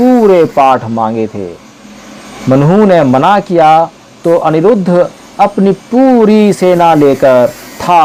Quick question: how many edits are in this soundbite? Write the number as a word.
zero